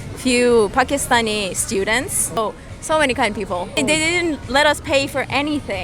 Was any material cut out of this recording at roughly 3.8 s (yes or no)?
yes